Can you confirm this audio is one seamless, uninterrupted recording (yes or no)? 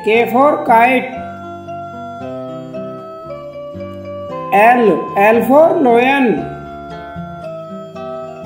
yes